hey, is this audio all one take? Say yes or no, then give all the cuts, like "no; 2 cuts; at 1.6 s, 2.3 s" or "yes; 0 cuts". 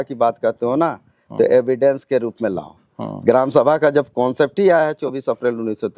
yes; 0 cuts